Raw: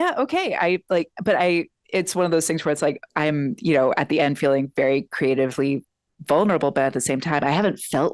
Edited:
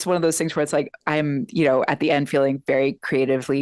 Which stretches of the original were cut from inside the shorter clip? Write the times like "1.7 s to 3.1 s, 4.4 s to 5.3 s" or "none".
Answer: none